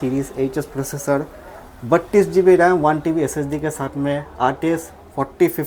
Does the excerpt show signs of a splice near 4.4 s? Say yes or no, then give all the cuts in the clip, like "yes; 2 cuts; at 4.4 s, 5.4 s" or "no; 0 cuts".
no; 0 cuts